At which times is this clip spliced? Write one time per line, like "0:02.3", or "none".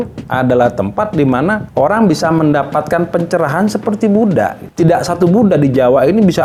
none